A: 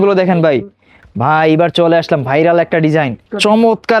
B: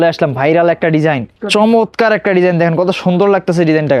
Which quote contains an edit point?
A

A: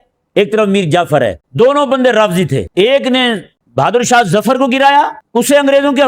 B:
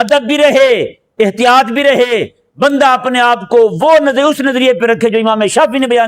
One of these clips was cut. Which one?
A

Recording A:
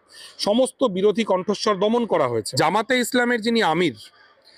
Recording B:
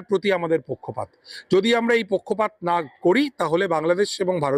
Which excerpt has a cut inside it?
A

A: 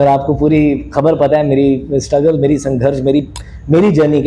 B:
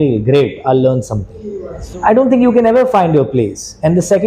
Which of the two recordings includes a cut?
B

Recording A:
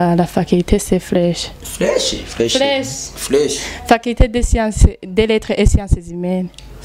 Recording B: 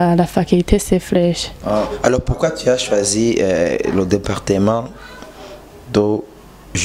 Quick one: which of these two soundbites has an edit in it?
B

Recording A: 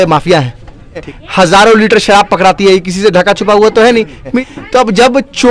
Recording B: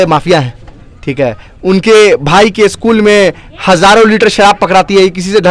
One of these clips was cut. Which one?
A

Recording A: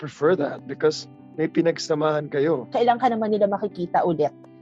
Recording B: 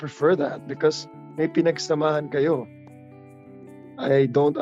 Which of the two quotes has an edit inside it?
A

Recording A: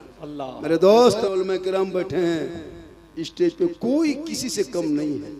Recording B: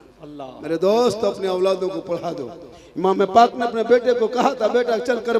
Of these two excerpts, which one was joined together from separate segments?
A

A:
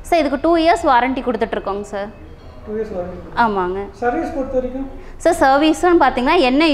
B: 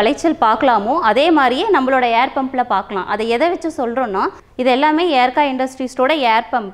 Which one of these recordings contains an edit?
B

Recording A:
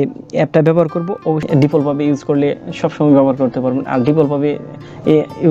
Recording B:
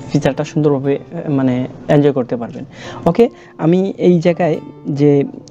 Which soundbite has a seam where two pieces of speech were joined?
A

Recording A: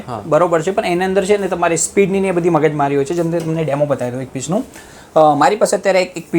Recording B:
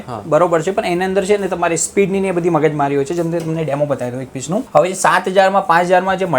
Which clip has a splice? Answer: B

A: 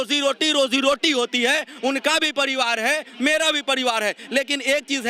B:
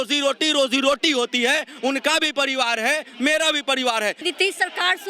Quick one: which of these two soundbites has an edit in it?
B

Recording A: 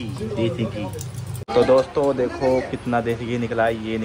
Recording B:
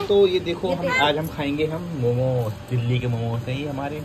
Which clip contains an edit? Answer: A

